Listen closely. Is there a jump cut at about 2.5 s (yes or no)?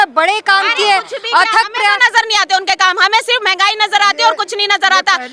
no